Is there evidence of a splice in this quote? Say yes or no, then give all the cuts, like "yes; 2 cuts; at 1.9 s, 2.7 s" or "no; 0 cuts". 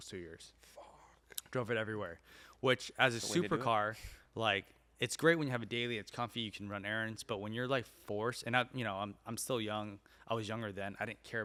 no; 0 cuts